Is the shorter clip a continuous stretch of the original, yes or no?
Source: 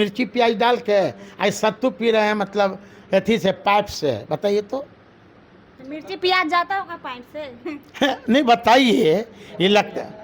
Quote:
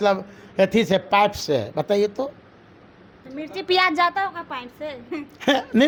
yes